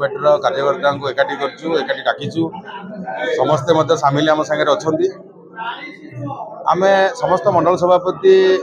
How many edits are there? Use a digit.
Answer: 0